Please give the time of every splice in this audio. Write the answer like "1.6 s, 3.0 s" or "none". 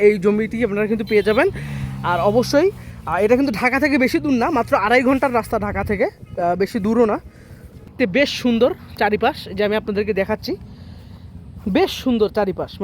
7.9 s